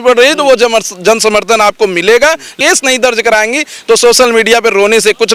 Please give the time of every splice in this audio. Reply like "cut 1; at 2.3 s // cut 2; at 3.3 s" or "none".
cut 1; at 2.5 s